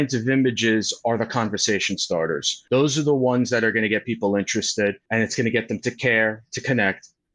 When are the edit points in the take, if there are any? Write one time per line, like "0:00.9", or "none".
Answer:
0:02.5
0:05.0